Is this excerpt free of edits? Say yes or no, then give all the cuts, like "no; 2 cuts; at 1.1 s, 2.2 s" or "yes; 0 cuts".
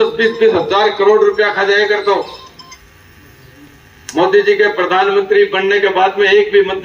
yes; 0 cuts